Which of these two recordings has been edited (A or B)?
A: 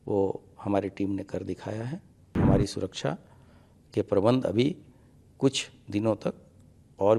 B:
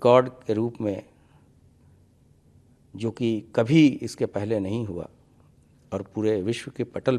A